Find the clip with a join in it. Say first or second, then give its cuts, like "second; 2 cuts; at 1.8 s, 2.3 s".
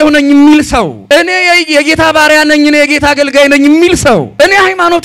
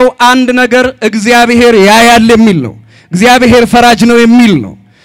first; 2 cuts; at 1.0 s, 4.3 s